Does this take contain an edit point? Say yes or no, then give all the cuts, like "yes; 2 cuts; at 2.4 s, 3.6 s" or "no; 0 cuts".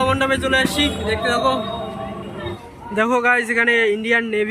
yes; 1 cut; at 2.5 s